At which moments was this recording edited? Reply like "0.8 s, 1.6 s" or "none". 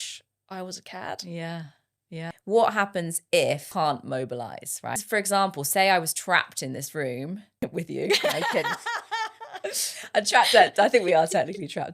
2.3 s, 3.7 s, 5.0 s, 7.5 s